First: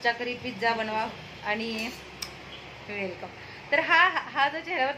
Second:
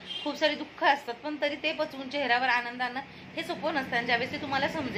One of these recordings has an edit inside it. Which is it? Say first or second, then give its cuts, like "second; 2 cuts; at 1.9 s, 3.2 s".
first; 1 cut; at 0.9 s